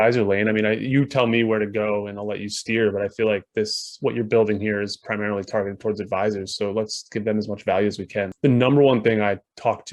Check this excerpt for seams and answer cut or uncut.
cut